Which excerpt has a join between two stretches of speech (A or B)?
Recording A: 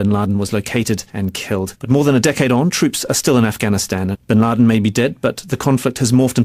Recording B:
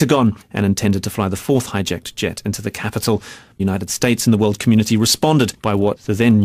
A